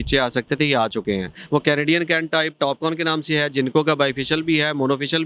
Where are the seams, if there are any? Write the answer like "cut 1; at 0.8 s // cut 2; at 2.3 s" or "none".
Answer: cut 1; at 1.3 s